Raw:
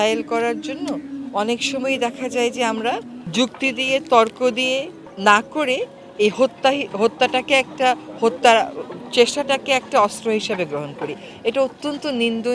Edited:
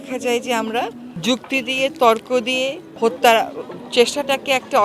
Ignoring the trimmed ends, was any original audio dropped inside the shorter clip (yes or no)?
yes